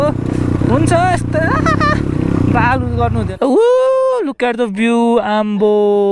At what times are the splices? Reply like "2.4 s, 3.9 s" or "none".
3.3 s

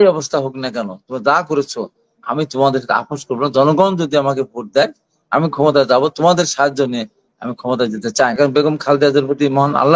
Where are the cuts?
8.4 s

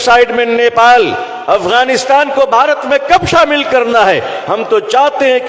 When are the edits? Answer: none

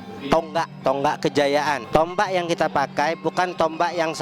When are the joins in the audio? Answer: 0.8 s, 1.8 s

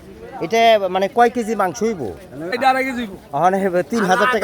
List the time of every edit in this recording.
2.5 s

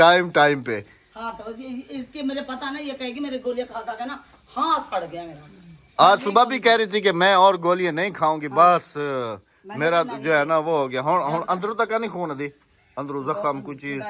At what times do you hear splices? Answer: none

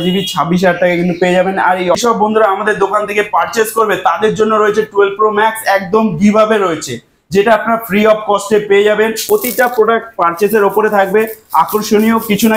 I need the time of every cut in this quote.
2.0 s, 9.2 s

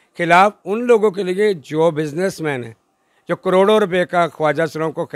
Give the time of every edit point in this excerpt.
none

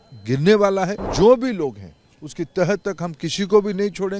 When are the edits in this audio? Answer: 1.0 s

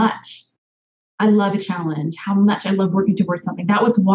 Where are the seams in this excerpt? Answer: none

